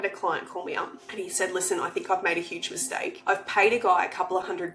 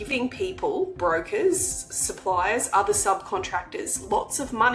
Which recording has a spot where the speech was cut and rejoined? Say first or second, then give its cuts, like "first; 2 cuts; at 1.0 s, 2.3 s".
first; 2 cuts; at 1.0 s, 3.2 s